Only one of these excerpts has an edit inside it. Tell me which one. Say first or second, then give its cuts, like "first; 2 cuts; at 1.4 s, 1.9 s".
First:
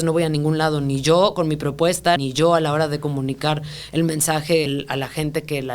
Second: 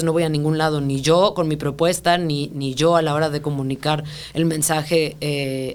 first; 2 cuts; at 2.2 s, 4.7 s